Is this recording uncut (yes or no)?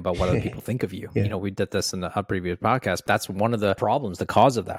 no